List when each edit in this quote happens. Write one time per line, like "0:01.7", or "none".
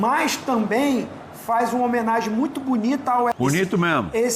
0:03.3

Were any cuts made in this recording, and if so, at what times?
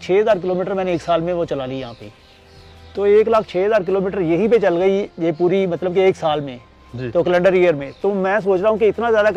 none

